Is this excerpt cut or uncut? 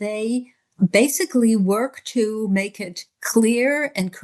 uncut